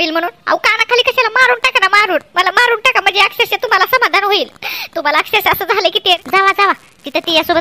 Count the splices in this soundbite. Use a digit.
1